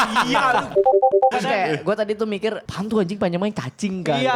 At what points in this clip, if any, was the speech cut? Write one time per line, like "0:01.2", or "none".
0:02.7